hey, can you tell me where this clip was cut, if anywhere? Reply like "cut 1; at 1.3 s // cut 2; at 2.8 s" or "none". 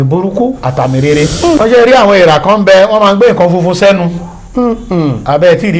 cut 1; at 1.6 s